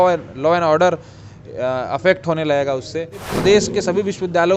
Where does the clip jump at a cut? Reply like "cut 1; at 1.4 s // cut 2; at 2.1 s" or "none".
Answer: cut 1; at 3.3 s